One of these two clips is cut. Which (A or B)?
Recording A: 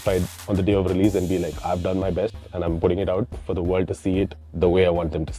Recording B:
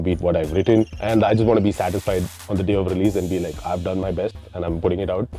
B